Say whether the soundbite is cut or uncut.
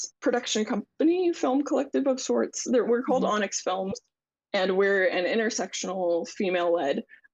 uncut